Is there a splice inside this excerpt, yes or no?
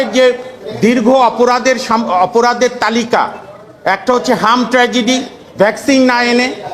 no